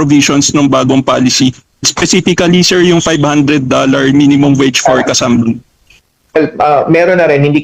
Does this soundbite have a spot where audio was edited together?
no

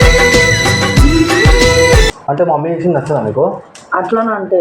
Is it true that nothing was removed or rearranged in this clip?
no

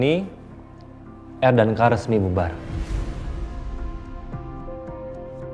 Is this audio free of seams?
yes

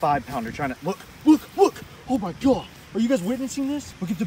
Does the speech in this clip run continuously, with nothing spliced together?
yes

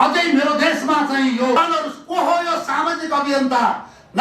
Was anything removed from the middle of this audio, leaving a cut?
yes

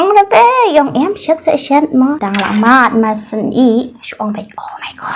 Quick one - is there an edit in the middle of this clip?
yes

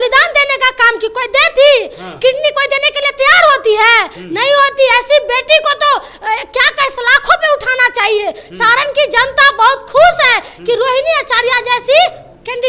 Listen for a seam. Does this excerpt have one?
no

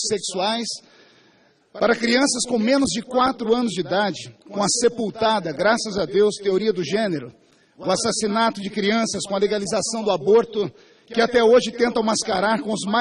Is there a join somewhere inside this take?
yes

